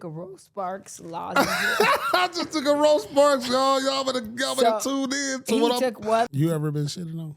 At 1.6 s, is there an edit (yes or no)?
no